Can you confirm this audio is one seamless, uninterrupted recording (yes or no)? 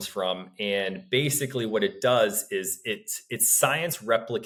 yes